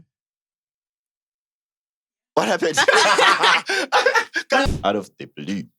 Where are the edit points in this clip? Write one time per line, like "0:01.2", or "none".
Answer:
0:04.7